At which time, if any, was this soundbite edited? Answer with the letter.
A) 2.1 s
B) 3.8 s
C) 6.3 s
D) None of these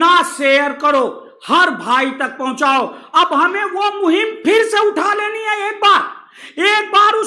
D